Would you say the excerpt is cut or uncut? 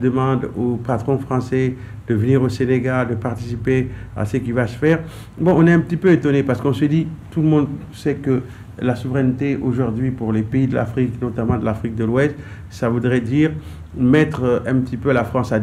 uncut